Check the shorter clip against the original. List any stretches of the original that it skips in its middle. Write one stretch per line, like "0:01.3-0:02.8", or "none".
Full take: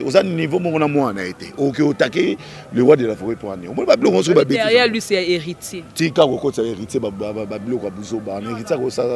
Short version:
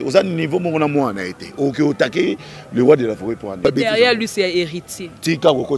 0:03.6-0:04.4